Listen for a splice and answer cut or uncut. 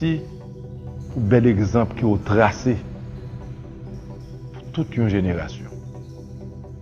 cut